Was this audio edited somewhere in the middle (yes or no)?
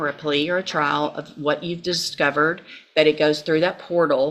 no